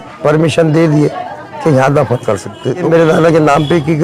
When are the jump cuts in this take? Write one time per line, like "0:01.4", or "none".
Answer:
0:02.9